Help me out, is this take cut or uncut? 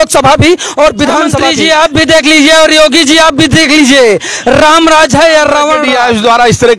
cut